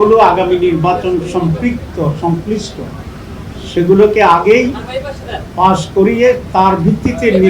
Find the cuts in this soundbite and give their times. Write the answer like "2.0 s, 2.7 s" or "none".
none